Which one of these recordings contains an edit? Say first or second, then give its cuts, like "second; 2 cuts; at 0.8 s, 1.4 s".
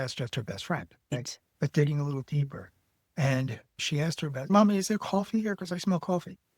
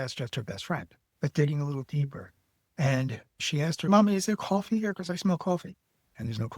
second; 2 cuts; at 1.0 s, 3.8 s